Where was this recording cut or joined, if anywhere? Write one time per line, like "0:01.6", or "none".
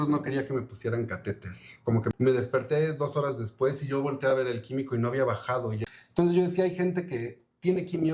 0:02.1
0:05.8